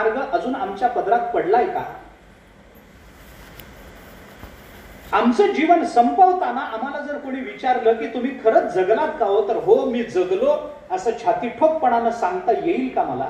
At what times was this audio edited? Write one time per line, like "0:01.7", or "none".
none

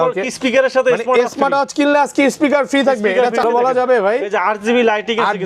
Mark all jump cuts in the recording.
0:03.4

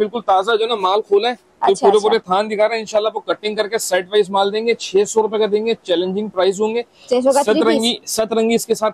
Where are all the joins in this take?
none

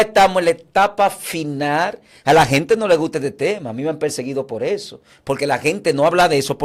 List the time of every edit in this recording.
none

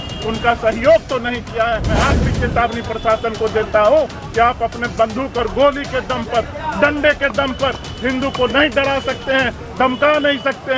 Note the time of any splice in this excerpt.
0:02.0

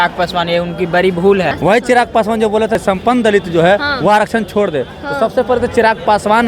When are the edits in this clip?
0:01.5
0:02.8

